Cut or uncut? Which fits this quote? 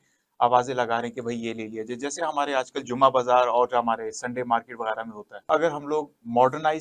cut